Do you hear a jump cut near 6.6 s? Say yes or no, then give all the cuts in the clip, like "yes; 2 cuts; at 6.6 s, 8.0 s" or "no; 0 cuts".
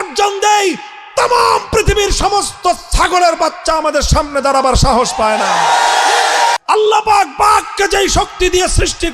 yes; 1 cut; at 6.6 s